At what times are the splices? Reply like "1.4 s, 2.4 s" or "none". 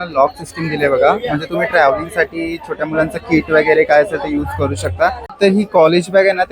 5.3 s